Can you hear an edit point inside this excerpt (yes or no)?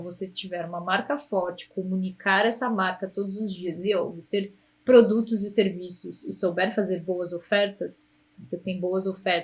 no